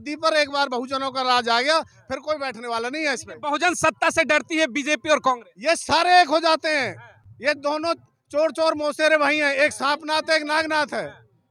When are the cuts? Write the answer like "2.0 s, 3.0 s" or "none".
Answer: none